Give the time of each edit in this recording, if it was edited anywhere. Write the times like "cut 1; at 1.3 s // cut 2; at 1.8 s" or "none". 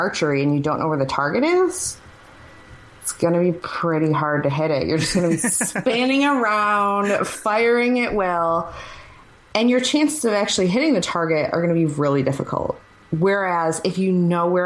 none